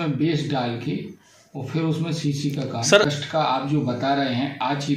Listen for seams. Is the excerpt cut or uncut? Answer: cut